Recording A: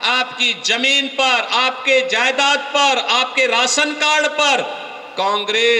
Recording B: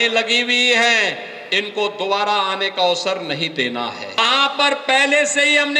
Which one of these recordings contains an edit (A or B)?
B